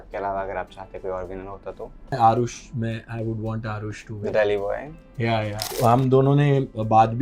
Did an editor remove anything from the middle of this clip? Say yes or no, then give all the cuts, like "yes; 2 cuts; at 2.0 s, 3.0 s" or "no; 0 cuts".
yes; 2 cuts; at 2.1 s, 5.6 s